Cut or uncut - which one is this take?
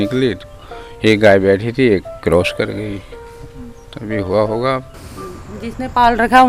cut